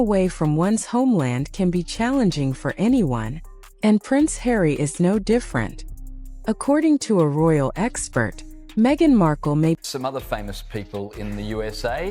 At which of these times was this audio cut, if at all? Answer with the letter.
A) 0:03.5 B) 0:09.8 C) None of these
B